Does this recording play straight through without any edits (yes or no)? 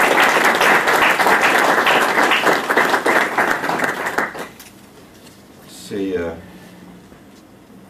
no